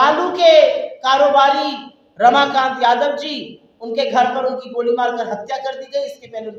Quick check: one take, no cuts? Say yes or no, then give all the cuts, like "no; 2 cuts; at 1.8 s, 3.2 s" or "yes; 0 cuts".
yes; 0 cuts